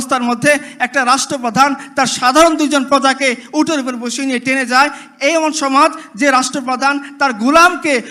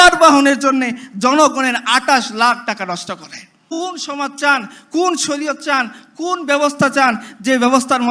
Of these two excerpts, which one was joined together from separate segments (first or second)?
second